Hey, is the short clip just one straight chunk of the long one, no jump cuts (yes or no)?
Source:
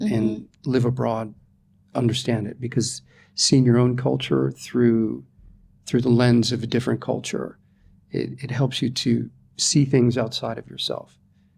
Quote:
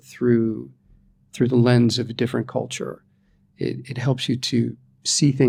yes